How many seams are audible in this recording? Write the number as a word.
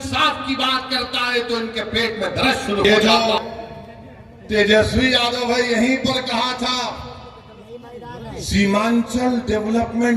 one